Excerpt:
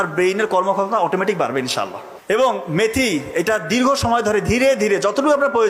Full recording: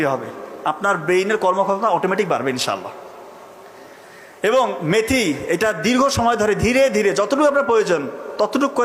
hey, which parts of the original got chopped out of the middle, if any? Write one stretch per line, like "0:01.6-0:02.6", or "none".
0:03.0-0:04.2